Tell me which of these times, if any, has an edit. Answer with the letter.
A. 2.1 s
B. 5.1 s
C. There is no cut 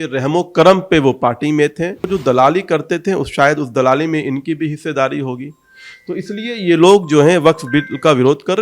A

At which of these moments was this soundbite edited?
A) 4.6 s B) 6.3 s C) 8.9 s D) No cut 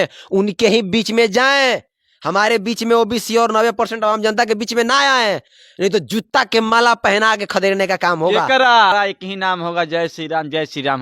C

